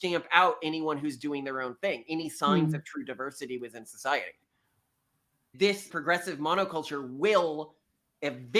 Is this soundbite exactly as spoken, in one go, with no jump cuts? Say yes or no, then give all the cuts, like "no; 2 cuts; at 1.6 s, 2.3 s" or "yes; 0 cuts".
no; 1 cut; at 5.5 s